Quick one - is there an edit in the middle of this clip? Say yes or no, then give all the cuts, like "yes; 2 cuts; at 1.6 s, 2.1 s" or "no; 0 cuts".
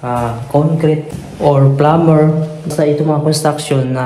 no; 0 cuts